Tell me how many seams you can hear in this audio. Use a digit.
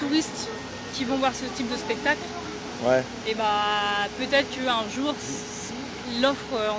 0